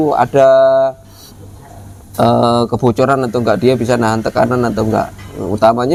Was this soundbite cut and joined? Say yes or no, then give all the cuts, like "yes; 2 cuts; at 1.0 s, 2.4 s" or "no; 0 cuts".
no; 0 cuts